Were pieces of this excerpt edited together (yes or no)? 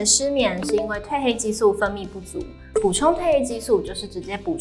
no